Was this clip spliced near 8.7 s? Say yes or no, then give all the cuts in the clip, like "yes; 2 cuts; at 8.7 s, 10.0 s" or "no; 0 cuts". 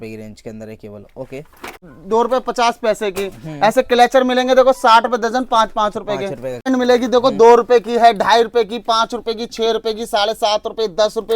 no; 2 cuts; at 1.9 s, 6.7 s